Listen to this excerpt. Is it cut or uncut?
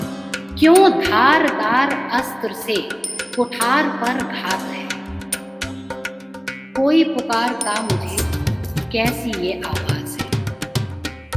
uncut